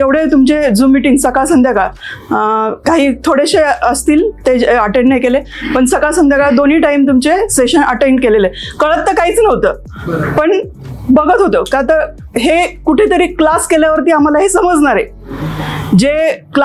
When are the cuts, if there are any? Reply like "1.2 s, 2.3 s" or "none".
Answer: none